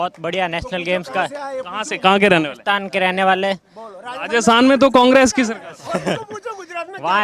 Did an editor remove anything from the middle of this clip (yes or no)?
no